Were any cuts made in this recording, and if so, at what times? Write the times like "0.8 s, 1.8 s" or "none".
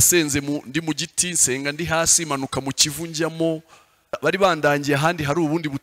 4.2 s